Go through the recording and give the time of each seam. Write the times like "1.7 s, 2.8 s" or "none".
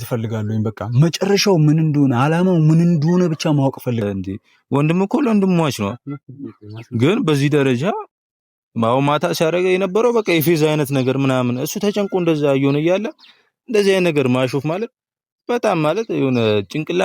4.0 s